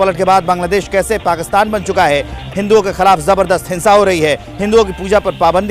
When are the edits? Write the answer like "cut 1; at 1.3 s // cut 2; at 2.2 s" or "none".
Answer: cut 1; at 2.4 s